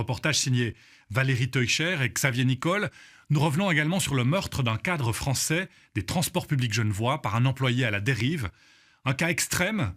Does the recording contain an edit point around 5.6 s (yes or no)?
yes